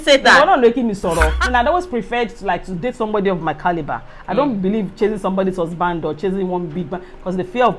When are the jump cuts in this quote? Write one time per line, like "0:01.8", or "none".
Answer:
0:01.4